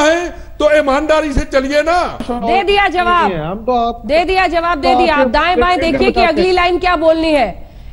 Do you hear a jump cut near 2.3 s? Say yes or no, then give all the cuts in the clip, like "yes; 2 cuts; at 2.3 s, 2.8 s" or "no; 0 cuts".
yes; 1 cut; at 2.3 s